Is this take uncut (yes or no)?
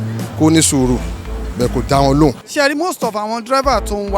no